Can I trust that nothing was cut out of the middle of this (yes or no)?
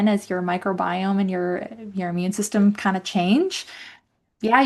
yes